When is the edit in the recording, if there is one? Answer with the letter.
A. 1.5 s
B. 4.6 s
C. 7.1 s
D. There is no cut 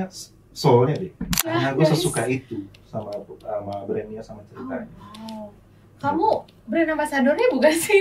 A